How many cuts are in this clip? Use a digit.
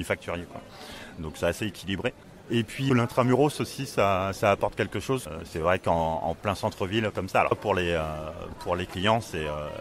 3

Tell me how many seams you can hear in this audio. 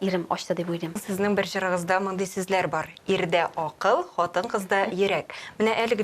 1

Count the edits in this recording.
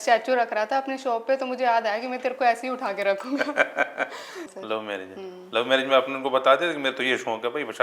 1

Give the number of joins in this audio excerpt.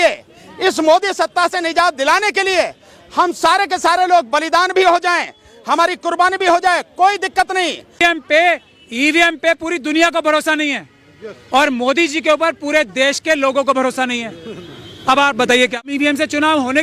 2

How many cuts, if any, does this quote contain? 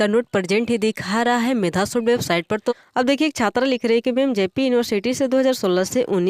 1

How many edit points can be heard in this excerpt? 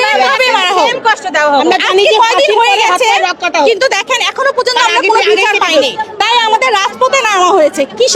1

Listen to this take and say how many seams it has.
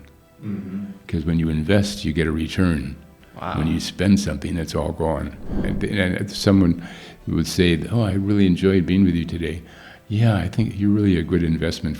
1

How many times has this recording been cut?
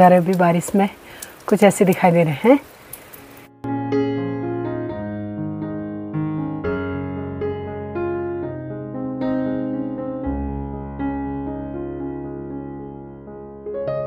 0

